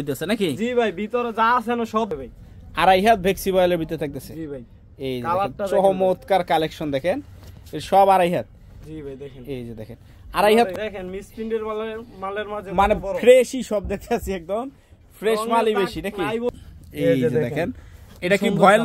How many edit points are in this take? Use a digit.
3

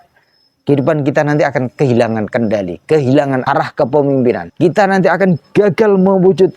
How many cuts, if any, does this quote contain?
2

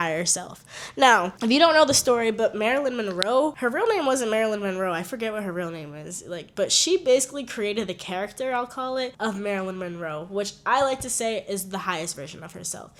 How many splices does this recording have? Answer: 0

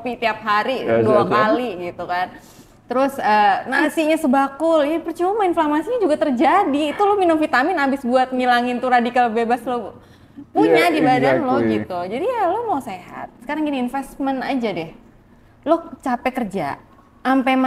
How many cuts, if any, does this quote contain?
0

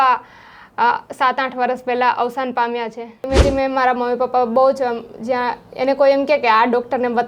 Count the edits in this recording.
1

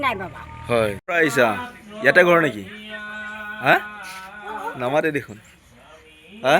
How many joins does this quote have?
1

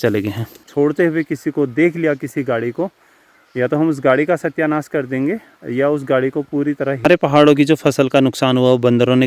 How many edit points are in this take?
2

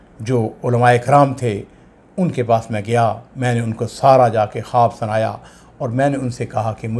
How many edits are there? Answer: 0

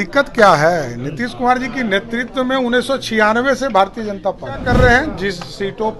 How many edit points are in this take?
1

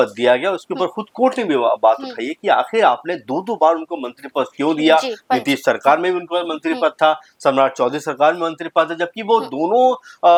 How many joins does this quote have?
0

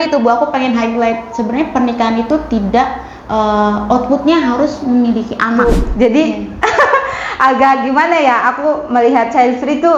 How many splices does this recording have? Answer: 1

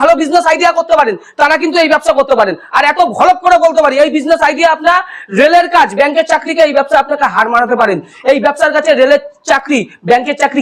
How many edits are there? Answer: 0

